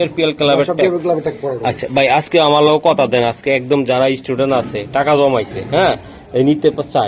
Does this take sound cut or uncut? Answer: uncut